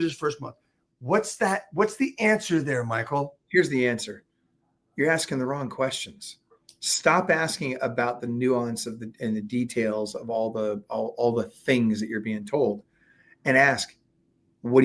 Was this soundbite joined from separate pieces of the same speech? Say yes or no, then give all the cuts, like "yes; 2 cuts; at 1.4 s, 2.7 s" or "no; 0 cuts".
no; 0 cuts